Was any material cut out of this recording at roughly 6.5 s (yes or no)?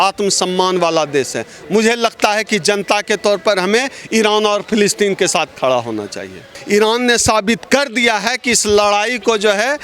yes